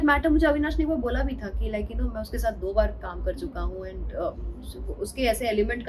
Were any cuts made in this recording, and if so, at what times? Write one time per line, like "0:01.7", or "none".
none